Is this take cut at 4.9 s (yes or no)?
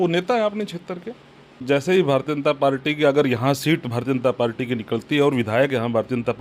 no